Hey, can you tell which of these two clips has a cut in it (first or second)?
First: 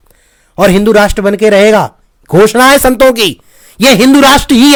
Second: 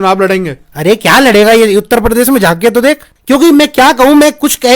second